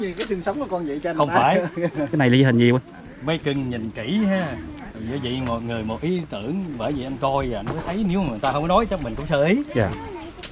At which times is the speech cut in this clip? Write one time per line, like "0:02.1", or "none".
none